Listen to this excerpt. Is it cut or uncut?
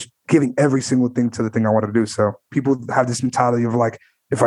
cut